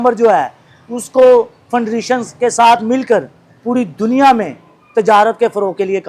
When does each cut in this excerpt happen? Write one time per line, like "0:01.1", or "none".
none